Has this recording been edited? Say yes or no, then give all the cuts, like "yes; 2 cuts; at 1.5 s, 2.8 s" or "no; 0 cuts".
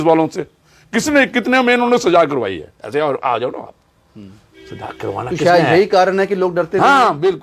no; 0 cuts